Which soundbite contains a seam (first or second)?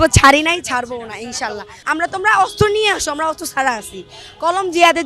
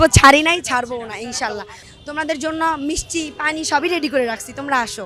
first